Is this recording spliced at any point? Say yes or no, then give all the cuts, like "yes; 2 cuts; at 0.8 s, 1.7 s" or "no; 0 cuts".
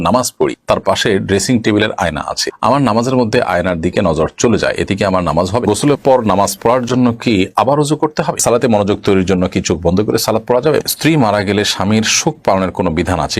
yes; 3 cuts; at 5.7 s, 8.4 s, 10.8 s